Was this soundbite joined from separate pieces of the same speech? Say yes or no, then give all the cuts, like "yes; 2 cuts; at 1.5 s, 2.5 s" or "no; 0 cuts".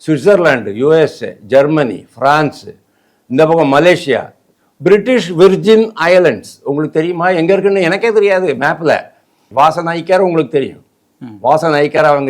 yes; 1 cut; at 9.4 s